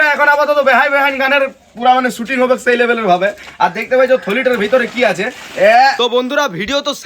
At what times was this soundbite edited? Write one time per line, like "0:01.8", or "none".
0:06.0